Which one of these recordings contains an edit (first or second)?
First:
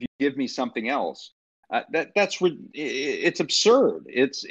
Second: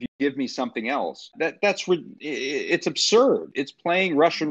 second